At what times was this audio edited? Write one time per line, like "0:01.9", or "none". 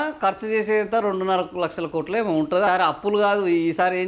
0:02.7